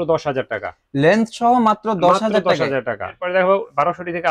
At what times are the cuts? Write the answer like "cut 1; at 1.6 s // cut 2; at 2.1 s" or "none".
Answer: cut 1; at 3.2 s